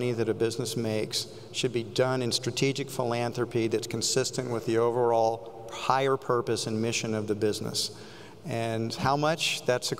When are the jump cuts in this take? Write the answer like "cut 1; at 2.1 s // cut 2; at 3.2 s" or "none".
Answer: none